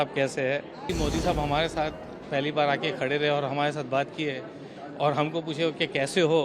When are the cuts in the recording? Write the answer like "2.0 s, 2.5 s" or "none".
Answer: 0.9 s